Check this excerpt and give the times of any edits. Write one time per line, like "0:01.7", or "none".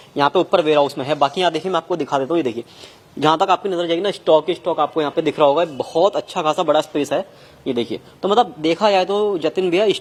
none